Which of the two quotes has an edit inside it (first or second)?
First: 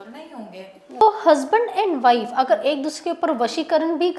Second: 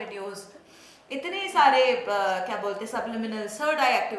first